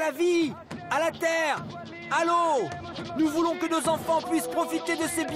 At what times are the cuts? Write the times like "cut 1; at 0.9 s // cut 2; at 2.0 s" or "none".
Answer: none